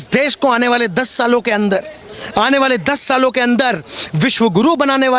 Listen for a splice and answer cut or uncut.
uncut